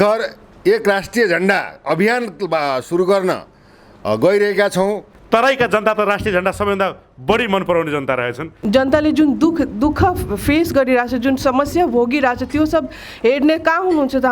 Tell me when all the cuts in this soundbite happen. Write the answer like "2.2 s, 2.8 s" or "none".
5.1 s, 8.6 s